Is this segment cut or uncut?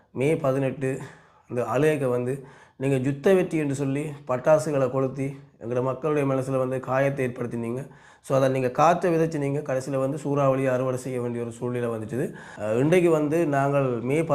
cut